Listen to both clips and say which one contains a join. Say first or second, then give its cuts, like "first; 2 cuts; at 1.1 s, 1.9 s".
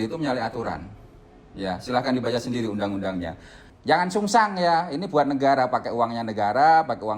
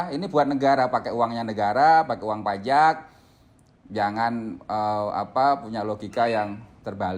first; 1 cut; at 3.7 s